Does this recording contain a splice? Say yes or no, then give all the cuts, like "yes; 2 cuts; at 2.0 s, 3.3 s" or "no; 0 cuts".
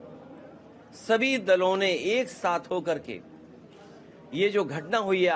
no; 0 cuts